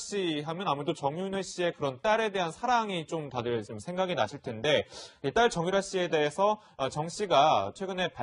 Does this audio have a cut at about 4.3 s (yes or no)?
yes